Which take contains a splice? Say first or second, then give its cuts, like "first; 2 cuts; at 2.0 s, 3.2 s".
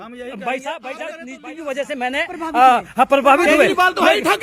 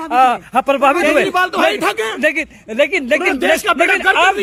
first; 1 cut; at 1.4 s